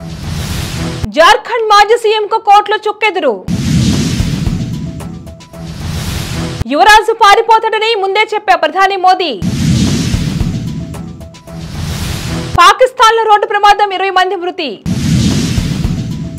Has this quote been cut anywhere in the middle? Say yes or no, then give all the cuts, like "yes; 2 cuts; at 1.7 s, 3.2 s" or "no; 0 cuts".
no; 0 cuts